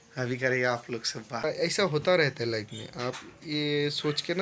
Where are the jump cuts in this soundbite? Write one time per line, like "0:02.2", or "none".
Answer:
0:01.4